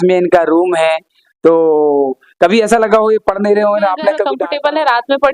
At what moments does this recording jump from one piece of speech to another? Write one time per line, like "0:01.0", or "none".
0:04.3